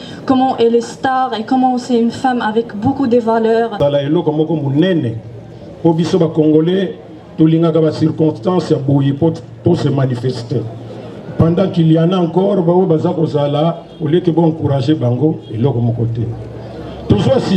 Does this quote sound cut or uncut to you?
cut